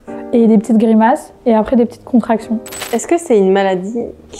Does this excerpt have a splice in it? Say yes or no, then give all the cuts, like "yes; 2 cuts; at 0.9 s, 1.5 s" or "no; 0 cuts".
yes; 1 cut; at 2.7 s